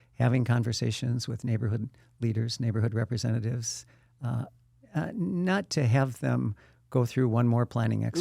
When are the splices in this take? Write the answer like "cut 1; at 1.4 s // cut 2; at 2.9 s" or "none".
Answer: none